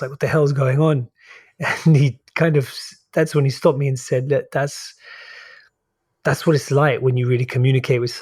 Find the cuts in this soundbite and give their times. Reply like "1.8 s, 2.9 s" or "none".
none